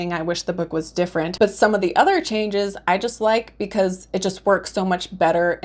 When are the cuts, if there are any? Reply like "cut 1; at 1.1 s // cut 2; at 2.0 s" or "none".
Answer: cut 1; at 1.3 s